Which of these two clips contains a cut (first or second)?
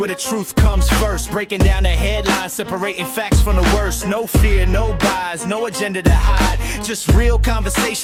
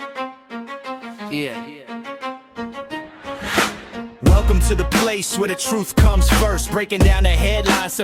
second